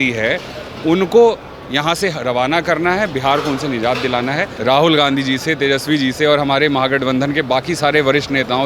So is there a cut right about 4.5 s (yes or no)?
yes